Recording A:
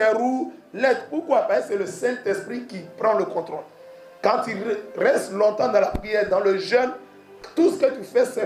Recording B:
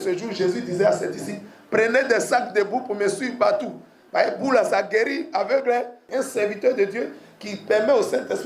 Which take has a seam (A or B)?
B